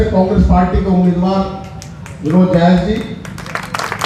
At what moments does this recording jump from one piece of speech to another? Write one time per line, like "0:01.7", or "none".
none